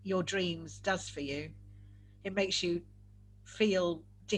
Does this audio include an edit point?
no; 0 cuts

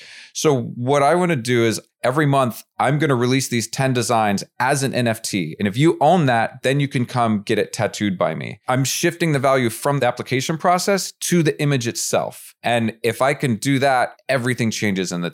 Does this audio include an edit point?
yes; 6 cuts; at 1.9 s, 5.5 s, 8.6 s, 10.0 s, 12.4 s, 14.2 s

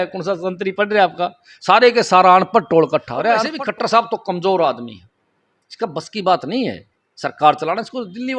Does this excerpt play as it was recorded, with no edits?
no; 1 cut; at 3.5 s

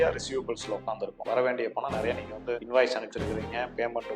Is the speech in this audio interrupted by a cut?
yes; 2 cuts; at 1.1 s, 2.6 s

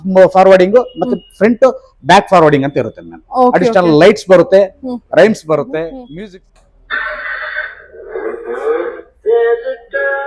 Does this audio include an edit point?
yes; 1 cut; at 6.1 s

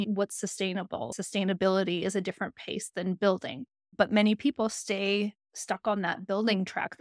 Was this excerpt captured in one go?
no; 1 cut; at 1.1 s

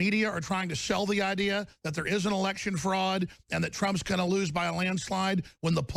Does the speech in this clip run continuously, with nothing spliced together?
yes; 0 cuts

